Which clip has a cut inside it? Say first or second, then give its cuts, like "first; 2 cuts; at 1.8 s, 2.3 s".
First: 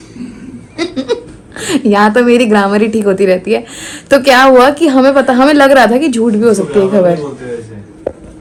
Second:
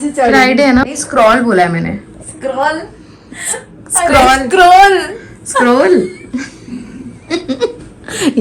second; 1 cut; at 1.0 s